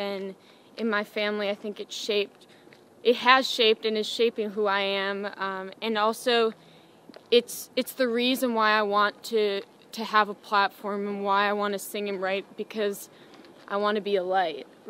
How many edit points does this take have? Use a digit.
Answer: 0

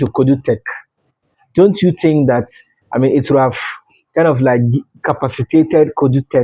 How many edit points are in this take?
0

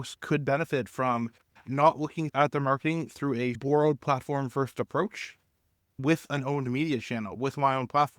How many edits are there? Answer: 3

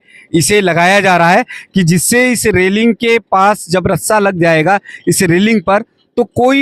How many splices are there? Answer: 0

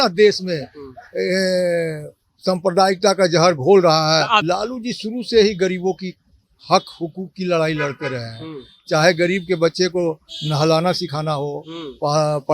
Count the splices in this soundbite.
1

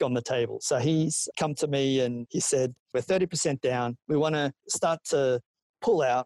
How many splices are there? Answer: 2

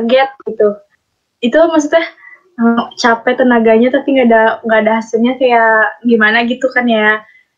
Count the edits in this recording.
1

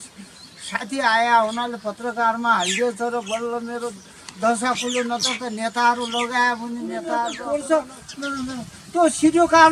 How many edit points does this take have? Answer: 1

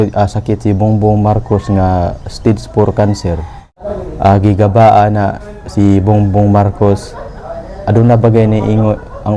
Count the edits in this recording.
1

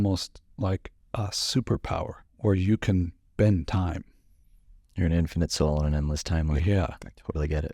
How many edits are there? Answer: 2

